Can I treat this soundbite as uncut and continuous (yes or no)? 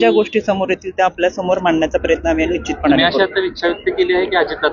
yes